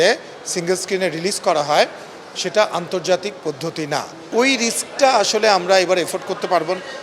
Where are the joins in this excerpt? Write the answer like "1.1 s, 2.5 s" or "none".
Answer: 4.3 s